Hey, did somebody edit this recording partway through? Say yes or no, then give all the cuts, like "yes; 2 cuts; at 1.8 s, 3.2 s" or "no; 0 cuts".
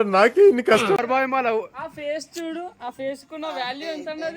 yes; 1 cut; at 1.0 s